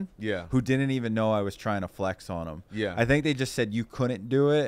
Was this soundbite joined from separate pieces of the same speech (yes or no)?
no